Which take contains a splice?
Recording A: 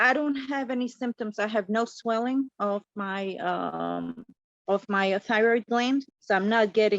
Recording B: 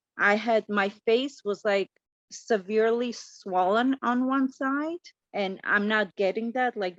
A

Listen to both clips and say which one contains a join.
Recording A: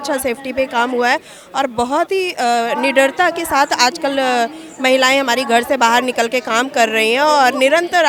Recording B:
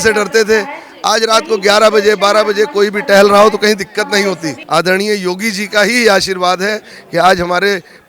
B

